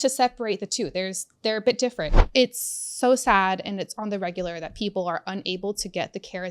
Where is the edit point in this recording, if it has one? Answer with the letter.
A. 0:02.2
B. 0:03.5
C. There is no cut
A